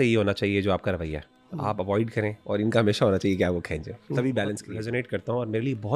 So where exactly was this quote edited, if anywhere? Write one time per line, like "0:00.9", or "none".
0:04.7